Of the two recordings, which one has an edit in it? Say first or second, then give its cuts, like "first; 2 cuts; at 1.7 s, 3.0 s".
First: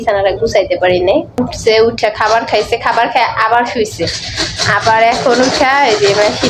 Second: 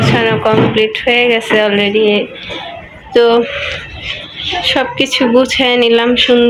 first; 1 cut; at 1.5 s